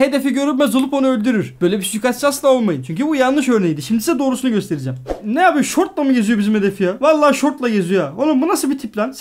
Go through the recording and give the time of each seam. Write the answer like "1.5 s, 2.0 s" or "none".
5.1 s